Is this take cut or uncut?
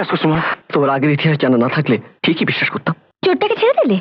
cut